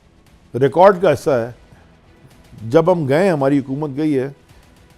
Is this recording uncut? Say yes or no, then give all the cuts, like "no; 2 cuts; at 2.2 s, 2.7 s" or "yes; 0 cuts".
yes; 0 cuts